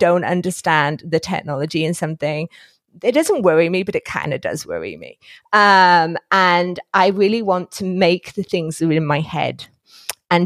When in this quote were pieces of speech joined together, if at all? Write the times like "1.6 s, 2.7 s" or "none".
none